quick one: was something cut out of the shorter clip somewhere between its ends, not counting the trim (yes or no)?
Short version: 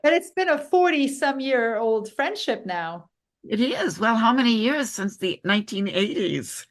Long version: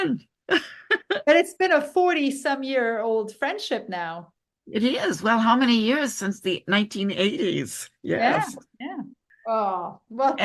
no